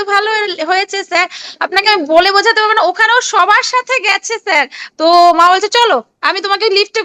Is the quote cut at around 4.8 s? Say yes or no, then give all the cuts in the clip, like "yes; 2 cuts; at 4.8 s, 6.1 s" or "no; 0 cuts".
yes; 1 cut; at 4.8 s